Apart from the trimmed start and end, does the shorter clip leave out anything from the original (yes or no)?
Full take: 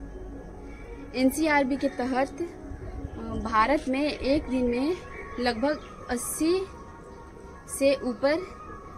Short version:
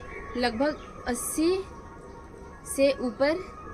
no